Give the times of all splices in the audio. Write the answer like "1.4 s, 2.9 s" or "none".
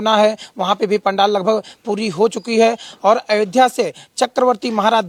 none